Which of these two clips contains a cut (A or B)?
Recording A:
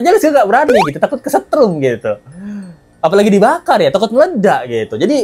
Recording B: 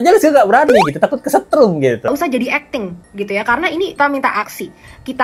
B